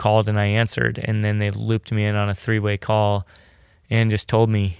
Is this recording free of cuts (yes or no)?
yes